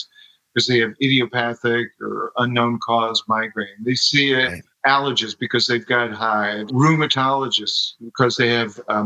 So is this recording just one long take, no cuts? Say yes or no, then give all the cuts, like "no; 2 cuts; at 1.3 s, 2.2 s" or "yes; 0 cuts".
no; 2 cuts; at 4.6 s, 6.7 s